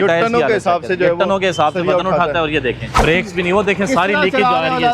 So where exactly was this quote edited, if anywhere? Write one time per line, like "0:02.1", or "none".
0:03.0

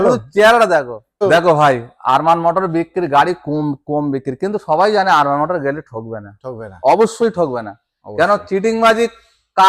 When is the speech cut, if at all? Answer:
0:01.2

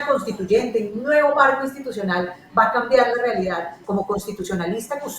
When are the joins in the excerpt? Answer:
0:03.8

